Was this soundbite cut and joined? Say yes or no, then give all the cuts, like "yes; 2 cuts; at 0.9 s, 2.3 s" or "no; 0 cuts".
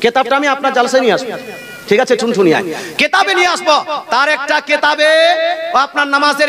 no; 0 cuts